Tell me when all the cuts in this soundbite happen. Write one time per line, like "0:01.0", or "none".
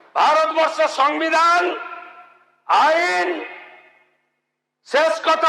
none

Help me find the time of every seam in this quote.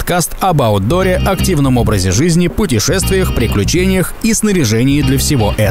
none

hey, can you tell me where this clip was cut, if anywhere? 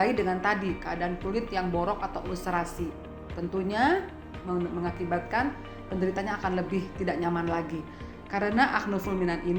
0:08.1

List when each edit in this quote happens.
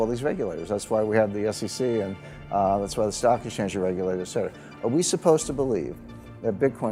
none

